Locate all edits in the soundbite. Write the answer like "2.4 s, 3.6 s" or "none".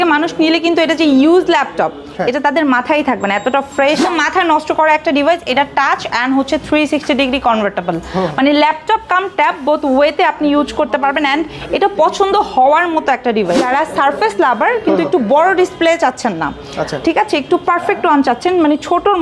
4.0 s, 13.6 s